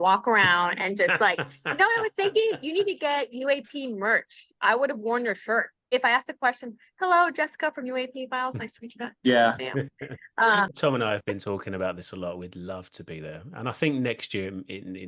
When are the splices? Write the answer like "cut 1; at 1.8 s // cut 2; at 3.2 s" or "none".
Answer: cut 1; at 5.9 s // cut 2; at 10.7 s